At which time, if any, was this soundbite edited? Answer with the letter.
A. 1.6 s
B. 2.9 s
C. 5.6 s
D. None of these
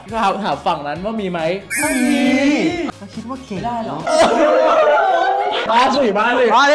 B